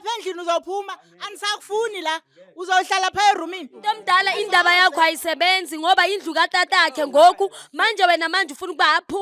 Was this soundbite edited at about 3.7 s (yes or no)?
yes